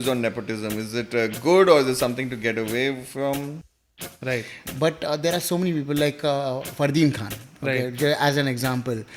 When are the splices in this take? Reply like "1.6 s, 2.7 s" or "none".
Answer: 3.8 s

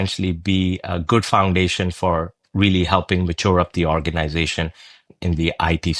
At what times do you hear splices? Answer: 5.1 s

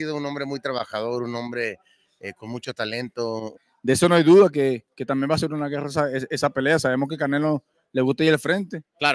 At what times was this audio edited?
3.7 s

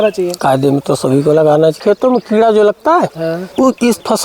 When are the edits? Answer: 1.8 s

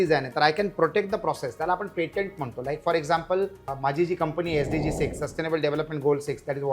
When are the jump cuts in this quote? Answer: 3.7 s

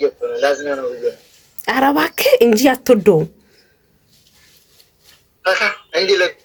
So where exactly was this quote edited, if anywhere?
none

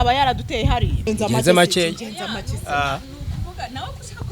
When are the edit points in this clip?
1.0 s

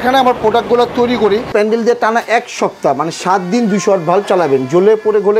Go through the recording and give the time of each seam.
1.5 s

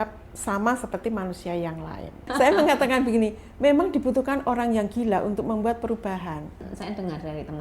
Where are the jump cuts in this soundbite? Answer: 2.2 s, 6.6 s

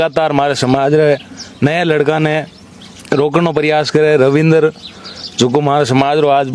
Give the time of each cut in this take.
none

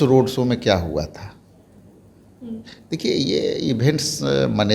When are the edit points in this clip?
none

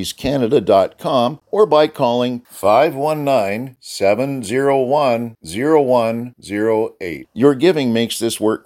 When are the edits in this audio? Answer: 1.4 s

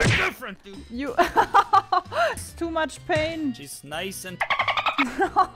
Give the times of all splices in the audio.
2.4 s

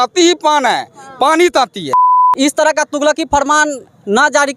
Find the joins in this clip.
2.2 s

